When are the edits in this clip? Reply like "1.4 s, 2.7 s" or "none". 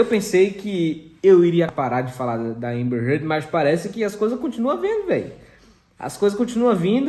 1.7 s